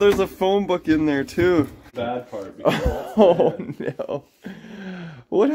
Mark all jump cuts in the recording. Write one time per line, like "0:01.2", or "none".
0:01.9